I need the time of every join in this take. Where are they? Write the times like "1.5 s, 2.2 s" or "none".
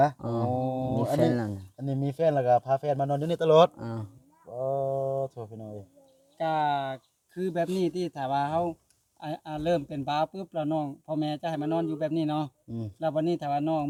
none